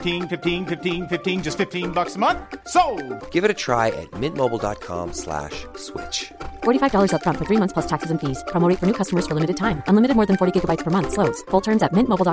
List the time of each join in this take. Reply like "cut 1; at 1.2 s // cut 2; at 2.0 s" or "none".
none